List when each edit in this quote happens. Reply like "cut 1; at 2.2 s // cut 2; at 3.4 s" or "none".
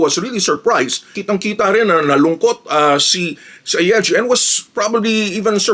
cut 1; at 1.1 s